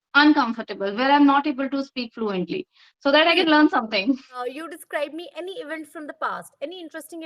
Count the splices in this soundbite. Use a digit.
1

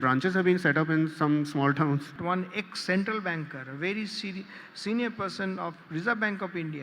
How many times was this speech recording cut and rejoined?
1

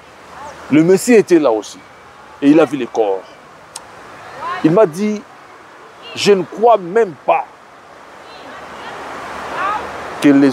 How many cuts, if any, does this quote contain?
0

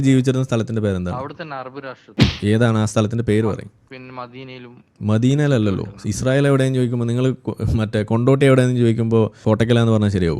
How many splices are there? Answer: 1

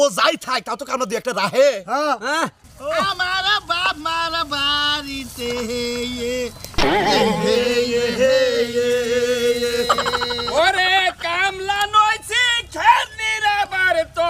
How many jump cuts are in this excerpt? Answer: 1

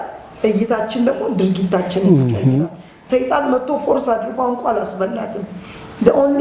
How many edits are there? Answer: 1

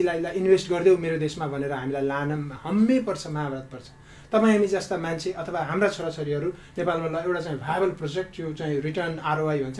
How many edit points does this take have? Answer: 0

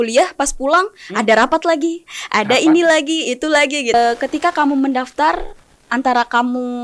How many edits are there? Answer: 1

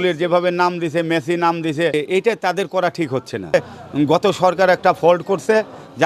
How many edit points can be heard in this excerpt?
2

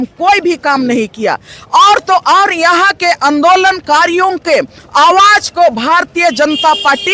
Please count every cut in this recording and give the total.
0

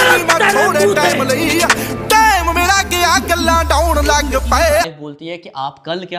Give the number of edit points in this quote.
1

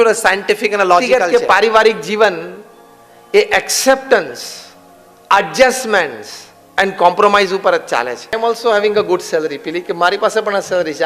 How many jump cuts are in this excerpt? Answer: 2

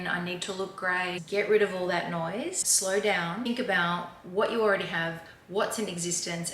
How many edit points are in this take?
3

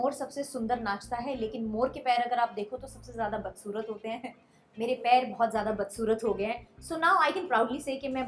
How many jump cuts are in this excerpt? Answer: 0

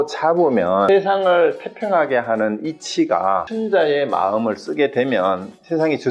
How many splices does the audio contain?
2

